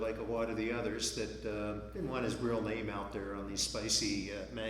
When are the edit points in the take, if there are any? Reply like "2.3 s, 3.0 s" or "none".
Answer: 1.9 s